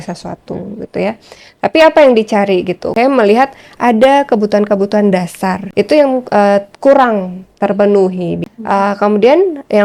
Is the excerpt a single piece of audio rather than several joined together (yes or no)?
no